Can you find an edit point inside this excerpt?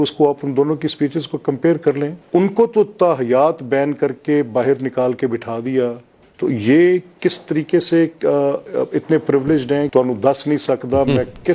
yes; 2 cuts; at 2.2 s, 9.9 s

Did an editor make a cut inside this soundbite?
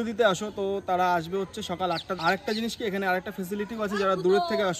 yes; 1 cut; at 2.1 s

